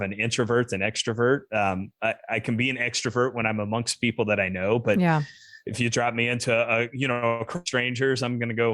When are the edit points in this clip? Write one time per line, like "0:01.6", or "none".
none